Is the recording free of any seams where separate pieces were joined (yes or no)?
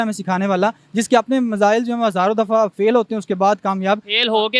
yes